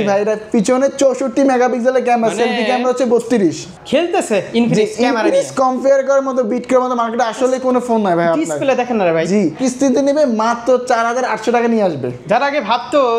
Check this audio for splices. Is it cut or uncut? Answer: cut